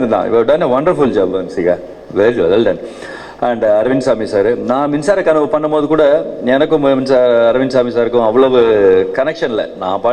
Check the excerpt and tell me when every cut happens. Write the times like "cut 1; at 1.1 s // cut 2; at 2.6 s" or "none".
none